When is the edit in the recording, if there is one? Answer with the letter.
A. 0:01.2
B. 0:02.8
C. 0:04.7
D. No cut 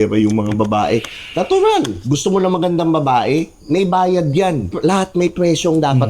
C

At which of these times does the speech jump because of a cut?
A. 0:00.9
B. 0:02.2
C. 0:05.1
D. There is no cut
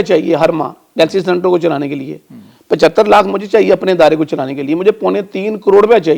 D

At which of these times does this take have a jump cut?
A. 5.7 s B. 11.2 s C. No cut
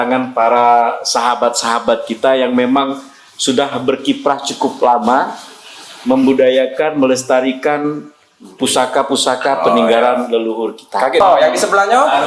B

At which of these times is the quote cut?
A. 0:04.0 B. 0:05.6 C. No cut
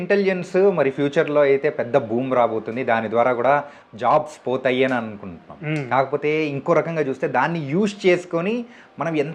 C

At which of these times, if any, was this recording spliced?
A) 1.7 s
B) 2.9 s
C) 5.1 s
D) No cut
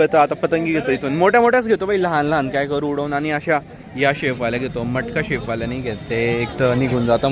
D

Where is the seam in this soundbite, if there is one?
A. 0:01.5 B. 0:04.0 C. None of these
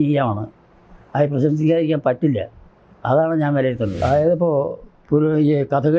B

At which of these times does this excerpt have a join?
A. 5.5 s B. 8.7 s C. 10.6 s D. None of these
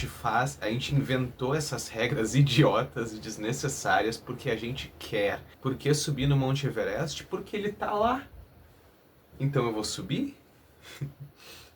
A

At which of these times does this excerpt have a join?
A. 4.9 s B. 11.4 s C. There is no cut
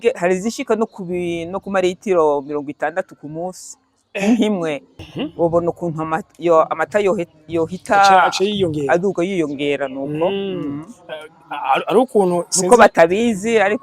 A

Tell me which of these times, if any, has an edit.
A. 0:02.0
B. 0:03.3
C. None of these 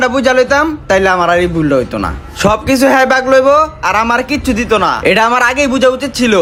C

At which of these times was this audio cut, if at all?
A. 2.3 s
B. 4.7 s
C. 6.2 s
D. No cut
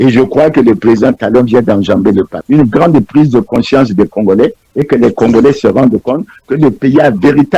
A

